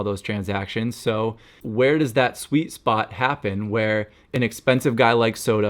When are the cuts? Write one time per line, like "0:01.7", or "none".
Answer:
0:01.5
0:04.3